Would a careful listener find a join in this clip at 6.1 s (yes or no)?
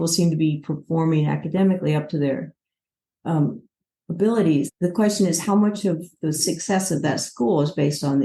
no